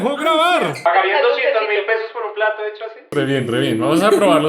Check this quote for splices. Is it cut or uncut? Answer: cut